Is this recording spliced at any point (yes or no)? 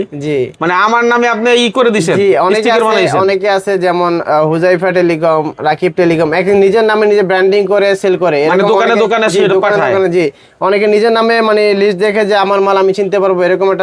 no